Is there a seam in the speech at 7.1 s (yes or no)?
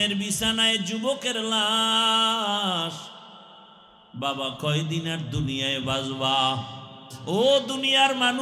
yes